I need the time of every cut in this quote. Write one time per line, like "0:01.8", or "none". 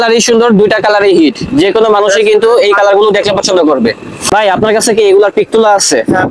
0:04.1